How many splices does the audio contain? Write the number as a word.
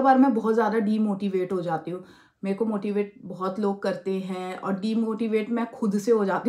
zero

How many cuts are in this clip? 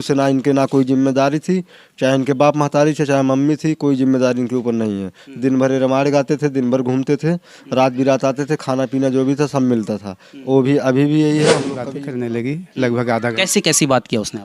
one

